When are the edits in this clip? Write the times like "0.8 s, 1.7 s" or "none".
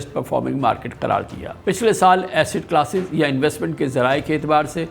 none